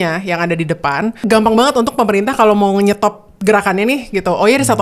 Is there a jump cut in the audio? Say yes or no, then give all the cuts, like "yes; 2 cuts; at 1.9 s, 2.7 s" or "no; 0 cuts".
yes; 1 cut; at 1.2 s